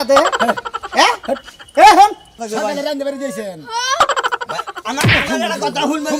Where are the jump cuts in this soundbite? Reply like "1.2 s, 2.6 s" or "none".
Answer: 2.4 s